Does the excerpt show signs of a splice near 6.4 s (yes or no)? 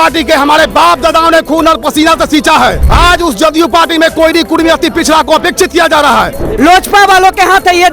yes